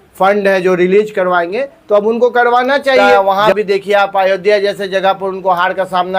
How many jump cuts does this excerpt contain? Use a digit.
1